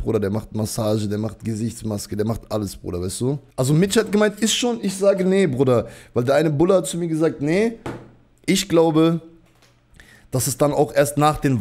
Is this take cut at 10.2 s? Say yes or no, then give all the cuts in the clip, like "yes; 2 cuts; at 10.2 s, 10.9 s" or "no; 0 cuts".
no; 1 cut; at 3.5 s